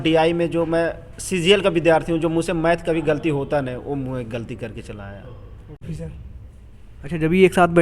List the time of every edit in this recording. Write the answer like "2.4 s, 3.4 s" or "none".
5.9 s

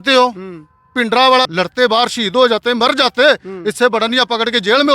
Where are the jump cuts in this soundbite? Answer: 1.5 s

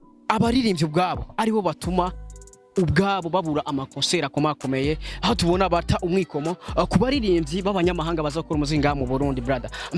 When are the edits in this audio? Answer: none

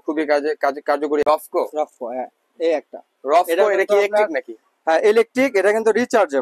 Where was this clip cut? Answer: 1.2 s

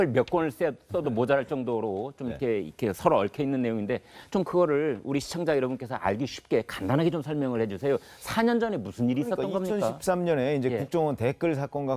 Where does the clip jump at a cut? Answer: none

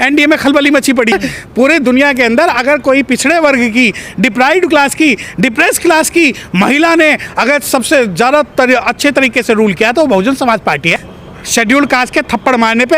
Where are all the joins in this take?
1.1 s, 10.9 s

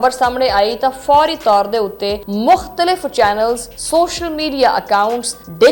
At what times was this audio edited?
2.2 s, 3.7 s

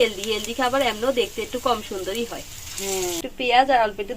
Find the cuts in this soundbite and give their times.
3.2 s

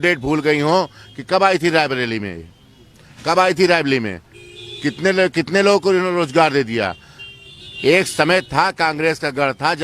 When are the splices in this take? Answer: none

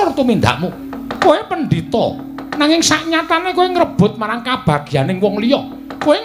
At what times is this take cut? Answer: 1.1 s

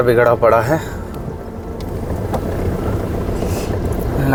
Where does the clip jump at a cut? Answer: none

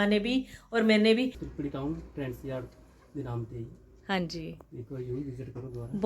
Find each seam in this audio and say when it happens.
1.4 s

